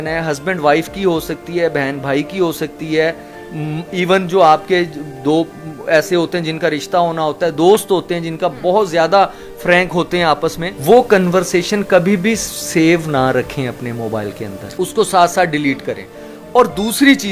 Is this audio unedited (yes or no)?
yes